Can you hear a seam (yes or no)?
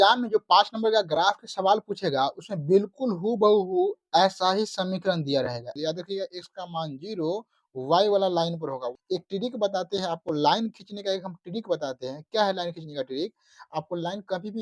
yes